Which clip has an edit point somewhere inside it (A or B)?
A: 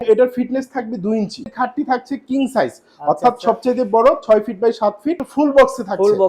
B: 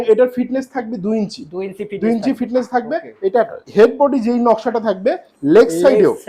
A